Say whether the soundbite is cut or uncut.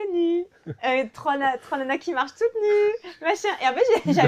uncut